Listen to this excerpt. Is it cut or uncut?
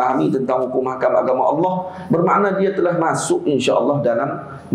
uncut